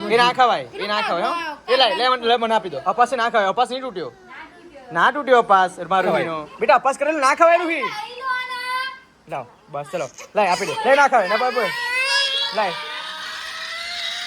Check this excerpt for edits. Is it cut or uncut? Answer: cut